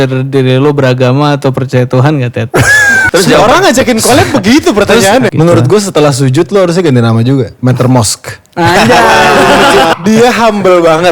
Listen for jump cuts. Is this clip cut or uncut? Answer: cut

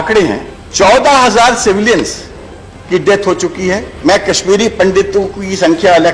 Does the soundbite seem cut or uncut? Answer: cut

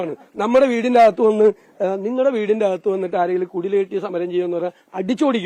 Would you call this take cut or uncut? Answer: uncut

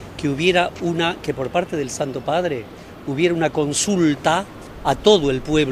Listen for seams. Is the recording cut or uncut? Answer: uncut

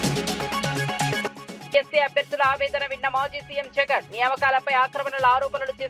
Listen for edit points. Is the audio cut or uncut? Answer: cut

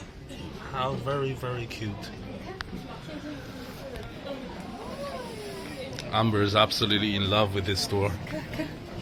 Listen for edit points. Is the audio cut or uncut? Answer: uncut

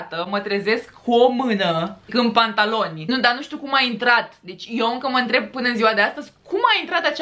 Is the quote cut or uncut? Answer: uncut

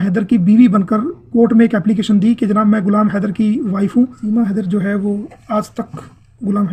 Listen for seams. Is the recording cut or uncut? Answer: cut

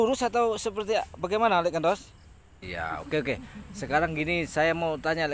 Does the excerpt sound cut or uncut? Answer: cut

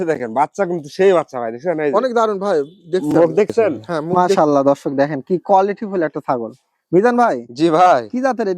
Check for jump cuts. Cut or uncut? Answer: cut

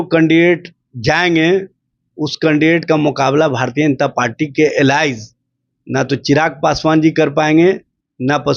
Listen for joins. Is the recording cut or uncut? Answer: uncut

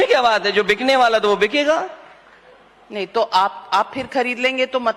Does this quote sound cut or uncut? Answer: uncut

